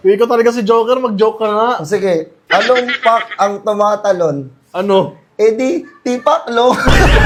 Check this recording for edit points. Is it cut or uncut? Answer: uncut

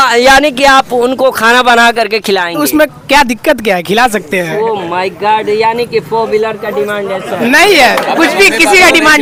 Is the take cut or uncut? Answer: uncut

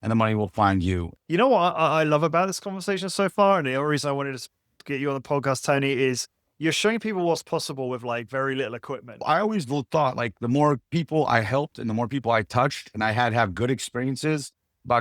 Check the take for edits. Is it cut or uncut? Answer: cut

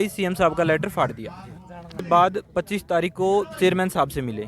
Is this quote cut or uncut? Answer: cut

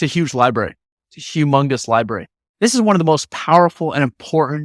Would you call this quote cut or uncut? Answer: uncut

